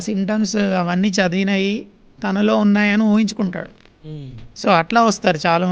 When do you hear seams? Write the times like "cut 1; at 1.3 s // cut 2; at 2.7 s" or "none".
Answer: none